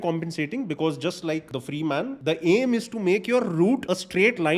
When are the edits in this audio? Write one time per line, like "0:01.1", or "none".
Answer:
0:01.8
0:03.8